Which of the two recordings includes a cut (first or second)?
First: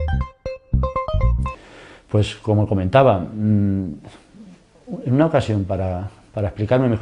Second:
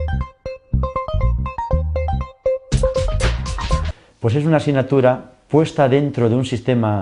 second